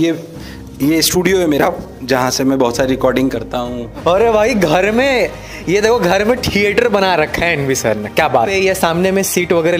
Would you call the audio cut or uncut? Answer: cut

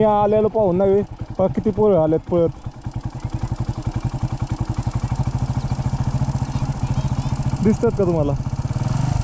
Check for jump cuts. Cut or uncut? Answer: uncut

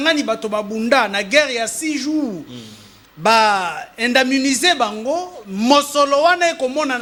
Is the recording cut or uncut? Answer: uncut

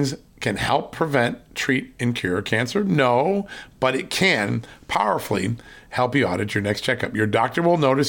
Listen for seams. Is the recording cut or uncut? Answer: uncut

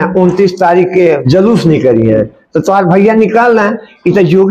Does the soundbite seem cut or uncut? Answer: cut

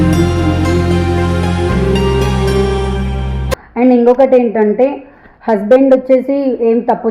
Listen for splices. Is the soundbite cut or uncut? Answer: uncut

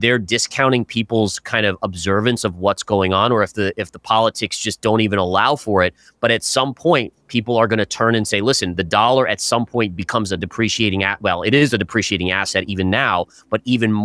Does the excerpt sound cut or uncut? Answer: uncut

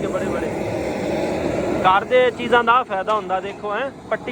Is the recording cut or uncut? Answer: uncut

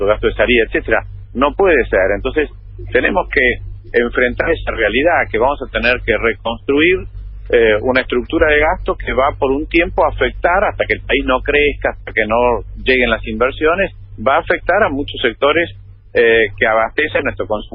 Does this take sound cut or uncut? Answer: cut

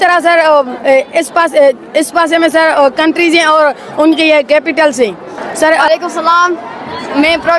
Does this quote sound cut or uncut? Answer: cut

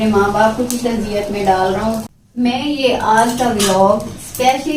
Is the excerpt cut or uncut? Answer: cut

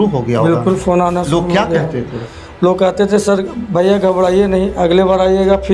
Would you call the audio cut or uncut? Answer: uncut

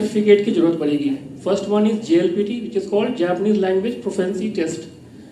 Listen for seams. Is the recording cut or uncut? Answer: uncut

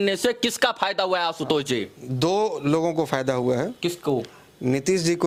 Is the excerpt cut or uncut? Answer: uncut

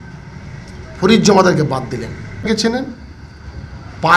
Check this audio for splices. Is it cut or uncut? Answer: cut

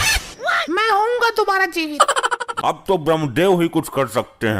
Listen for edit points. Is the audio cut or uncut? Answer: cut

